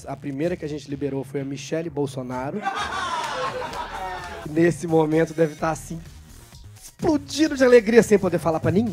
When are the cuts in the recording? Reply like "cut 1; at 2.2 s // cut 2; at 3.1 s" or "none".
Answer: cut 1; at 4.5 s